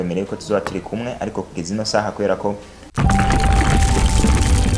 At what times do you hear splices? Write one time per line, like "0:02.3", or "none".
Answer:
0:02.8